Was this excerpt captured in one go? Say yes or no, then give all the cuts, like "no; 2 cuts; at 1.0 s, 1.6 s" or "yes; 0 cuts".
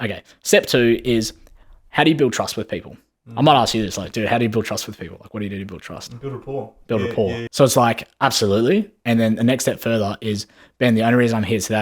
no; 1 cut; at 7.5 s